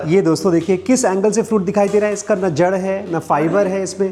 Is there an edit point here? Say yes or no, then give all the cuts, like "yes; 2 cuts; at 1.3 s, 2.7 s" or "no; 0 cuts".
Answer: no; 0 cuts